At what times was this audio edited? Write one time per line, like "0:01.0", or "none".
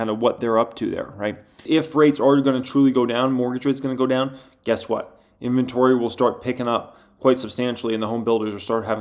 0:01.6